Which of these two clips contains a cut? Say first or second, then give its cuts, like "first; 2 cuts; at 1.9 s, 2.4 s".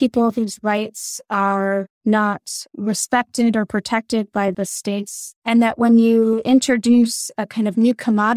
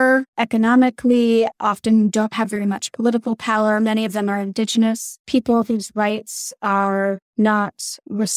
first; 1 cut; at 5.3 s